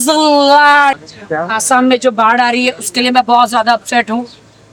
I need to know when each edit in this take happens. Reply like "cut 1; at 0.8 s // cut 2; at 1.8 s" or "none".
cut 1; at 1.1 s